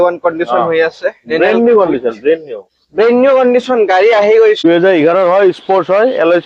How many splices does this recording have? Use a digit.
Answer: 1